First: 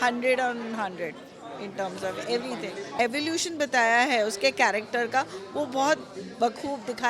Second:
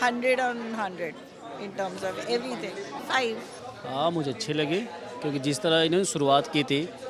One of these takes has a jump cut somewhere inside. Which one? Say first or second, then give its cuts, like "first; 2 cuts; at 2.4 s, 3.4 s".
first; 1 cut; at 2.9 s